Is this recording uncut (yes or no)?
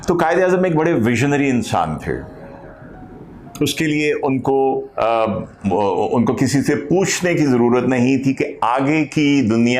yes